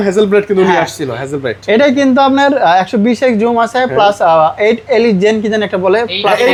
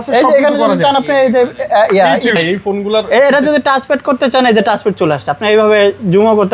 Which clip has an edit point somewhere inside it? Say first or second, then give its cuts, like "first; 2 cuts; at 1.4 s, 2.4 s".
second; 1 cut; at 2.4 s